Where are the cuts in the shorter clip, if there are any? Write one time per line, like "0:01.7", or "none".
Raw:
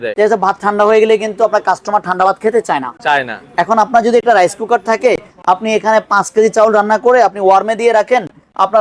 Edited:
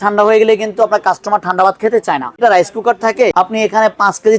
0:02.4
0:03.3